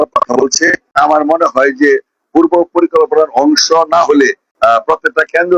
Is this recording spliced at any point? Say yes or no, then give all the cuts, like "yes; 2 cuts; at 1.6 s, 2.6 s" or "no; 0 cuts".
yes; 2 cuts; at 0.9 s, 4.4 s